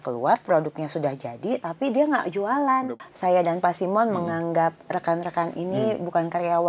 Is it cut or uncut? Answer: cut